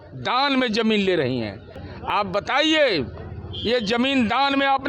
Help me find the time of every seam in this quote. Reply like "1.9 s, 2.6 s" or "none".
1.8 s

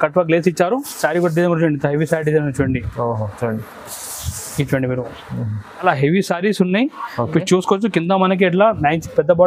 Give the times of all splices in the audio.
5.8 s

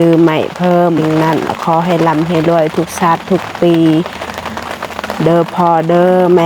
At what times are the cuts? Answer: 1.0 s

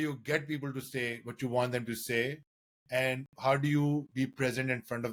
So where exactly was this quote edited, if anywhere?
none

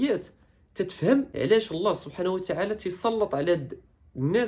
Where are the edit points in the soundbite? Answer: 1.3 s

